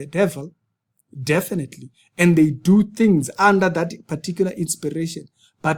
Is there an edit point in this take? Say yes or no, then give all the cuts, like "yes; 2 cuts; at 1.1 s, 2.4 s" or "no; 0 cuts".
no; 0 cuts